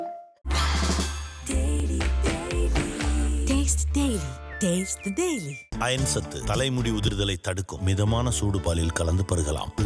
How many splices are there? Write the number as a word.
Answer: zero